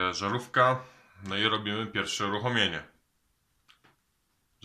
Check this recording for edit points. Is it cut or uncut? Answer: uncut